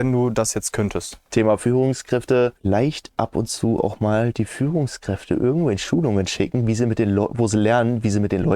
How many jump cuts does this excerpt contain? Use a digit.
2